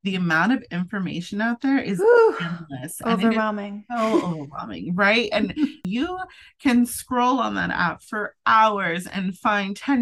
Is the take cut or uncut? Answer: cut